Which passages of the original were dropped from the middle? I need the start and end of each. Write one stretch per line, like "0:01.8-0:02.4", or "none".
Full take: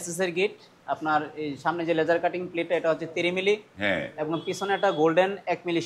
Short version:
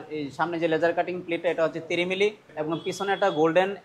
0:03.7-0:04.1

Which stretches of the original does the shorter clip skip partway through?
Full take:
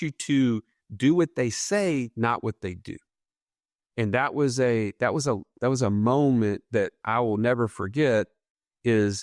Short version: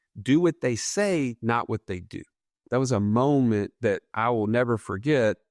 0:03.3-0:05.5

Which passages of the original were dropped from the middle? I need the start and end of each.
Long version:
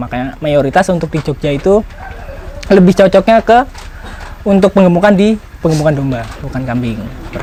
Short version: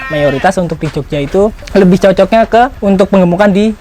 0:01.9-0:02.6
0:03.7-0:04.4

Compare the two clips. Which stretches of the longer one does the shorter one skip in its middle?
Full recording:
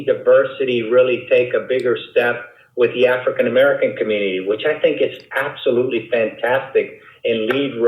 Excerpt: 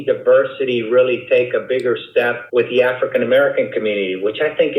0:02.4-0:02.6

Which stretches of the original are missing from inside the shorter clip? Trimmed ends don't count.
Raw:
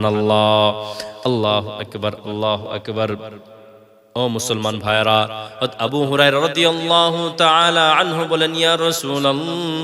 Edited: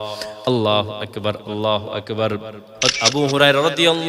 0:03.4-0:05.4

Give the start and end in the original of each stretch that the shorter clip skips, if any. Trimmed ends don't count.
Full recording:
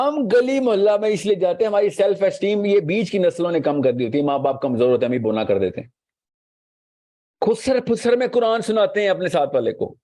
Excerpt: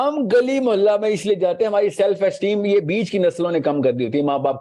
none

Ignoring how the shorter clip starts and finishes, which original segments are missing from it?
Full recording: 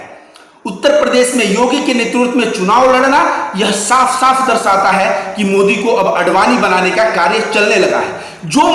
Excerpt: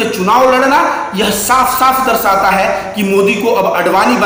none

